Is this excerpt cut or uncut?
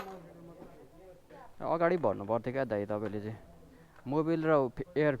cut